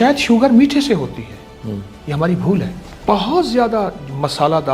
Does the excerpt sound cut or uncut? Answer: cut